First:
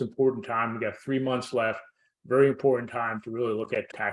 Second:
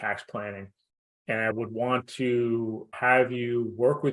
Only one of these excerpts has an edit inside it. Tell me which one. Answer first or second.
second